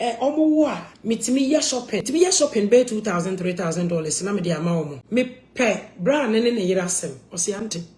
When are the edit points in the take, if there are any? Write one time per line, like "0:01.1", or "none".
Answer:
0:00.9
0:02.1
0:05.0